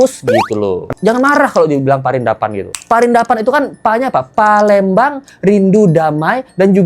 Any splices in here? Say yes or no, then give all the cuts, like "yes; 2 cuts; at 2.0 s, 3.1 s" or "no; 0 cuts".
yes; 1 cut; at 1.0 s